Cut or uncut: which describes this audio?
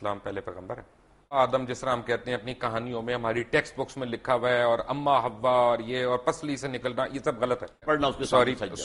cut